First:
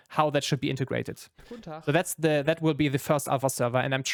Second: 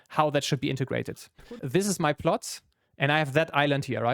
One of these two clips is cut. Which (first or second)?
second